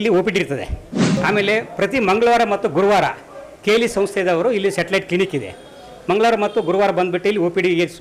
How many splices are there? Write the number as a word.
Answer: zero